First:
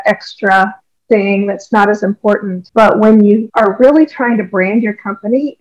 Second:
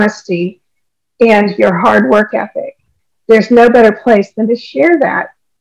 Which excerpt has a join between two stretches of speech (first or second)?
first